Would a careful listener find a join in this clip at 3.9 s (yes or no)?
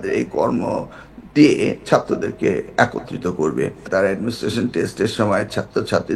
yes